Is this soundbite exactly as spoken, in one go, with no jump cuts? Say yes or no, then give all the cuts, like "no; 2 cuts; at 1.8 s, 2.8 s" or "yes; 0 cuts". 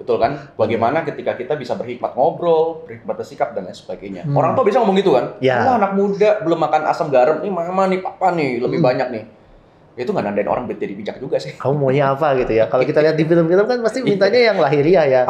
no; 2 cuts; at 4.2 s, 11.5 s